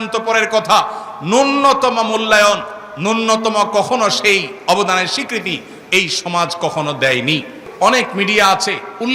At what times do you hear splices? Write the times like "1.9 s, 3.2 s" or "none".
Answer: 7.6 s